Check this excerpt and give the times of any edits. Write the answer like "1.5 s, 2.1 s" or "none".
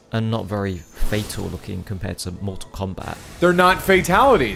none